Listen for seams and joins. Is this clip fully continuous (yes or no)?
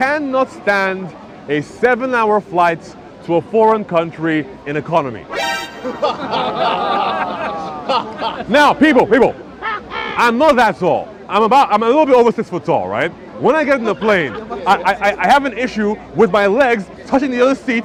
yes